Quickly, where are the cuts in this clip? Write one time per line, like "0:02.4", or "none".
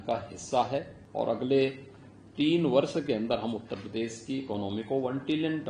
0:01.0